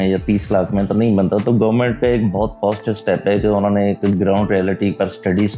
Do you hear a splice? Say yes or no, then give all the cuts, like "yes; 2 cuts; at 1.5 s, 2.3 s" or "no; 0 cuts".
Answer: no; 0 cuts